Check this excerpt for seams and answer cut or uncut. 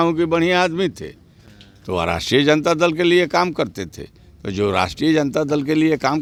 uncut